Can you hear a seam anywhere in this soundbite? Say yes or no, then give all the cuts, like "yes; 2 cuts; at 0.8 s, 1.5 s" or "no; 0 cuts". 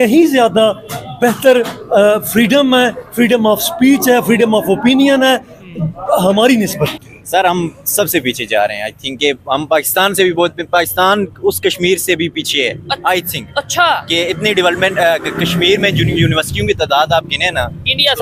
yes; 1 cut; at 7.1 s